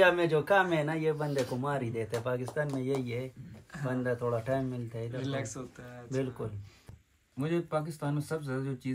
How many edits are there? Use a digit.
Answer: 0